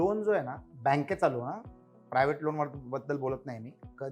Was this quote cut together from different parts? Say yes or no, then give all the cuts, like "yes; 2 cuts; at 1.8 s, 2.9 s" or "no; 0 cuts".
no; 0 cuts